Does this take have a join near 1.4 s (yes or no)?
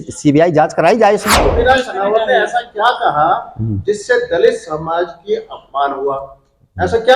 yes